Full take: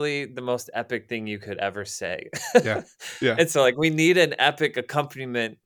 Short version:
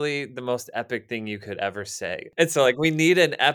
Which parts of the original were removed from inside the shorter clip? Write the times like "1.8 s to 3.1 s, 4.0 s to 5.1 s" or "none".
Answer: 2.3 s to 3.3 s